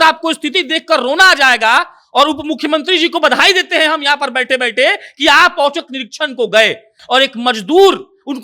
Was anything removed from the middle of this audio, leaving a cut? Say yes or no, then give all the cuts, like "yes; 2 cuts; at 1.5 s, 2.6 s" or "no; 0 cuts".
yes; 1 cut; at 7.0 s